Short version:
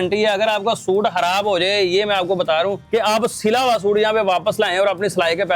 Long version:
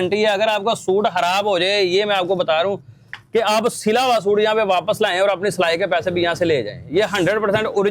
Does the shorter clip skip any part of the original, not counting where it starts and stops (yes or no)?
yes